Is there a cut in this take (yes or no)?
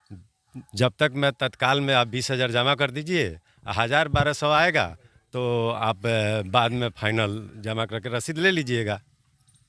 no